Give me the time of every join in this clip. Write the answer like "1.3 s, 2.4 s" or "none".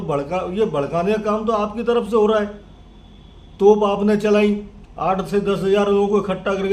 none